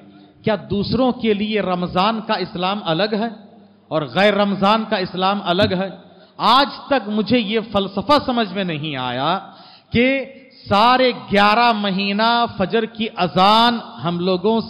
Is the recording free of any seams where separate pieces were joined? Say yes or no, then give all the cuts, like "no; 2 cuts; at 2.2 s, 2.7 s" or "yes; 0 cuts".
yes; 0 cuts